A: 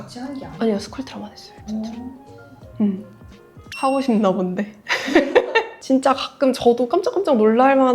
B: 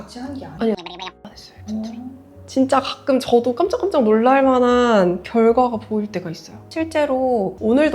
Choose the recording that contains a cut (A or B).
B